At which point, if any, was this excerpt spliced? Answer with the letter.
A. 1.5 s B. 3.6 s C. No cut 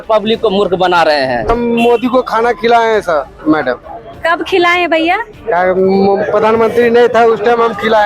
A